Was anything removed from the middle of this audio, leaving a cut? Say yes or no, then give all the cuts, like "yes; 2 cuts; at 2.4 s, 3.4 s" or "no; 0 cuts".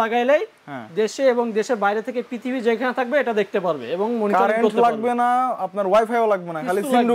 no; 0 cuts